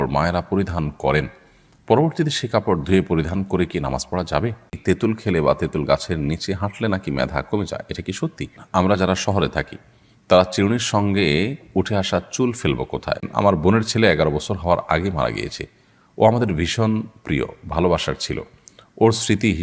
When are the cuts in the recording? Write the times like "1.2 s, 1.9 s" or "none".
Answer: 4.8 s, 8.6 s, 13.3 s

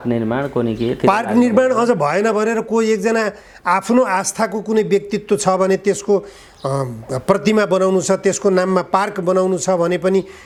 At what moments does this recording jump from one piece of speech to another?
none

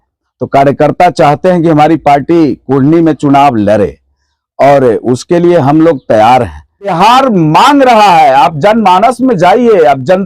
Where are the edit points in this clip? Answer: 6.9 s

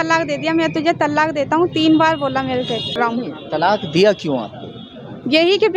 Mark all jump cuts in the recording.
3.0 s

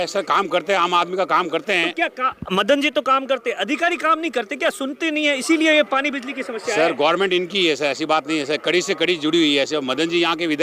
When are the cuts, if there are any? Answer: none

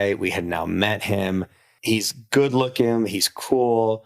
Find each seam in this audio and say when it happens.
1.7 s

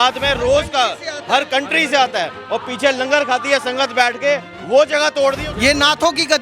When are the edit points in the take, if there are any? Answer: 5.5 s

